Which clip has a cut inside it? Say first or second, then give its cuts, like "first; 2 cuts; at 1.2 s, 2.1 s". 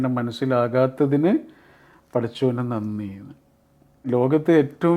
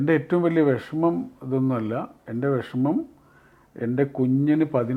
first; 1 cut; at 4.1 s